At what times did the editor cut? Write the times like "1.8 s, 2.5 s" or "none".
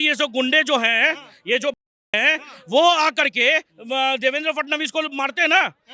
none